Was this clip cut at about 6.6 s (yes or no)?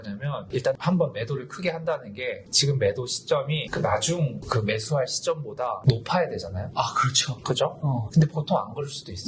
yes